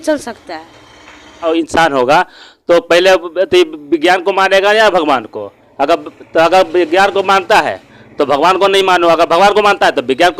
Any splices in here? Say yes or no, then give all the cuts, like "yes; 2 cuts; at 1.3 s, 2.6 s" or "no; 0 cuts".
yes; 1 cut; at 1.5 s